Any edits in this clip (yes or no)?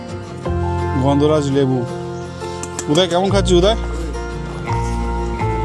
no